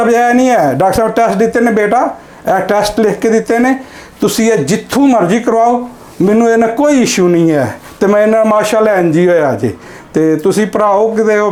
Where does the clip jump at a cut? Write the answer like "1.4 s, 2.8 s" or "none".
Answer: none